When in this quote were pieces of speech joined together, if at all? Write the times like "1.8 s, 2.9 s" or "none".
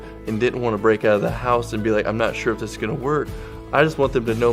1.0 s